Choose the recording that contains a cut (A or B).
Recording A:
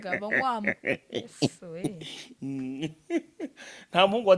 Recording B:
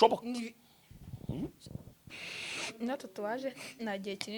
B